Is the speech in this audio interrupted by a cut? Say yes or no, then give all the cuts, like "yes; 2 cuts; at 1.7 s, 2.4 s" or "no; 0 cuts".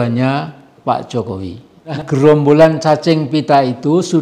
yes; 1 cut; at 2.0 s